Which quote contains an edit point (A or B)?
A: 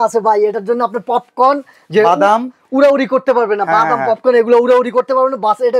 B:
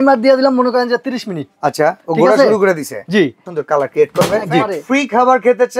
B